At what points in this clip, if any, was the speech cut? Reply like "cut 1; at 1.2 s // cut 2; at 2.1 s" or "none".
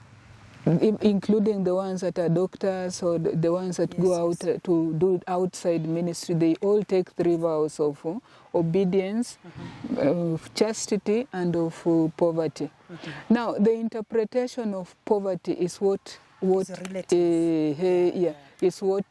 none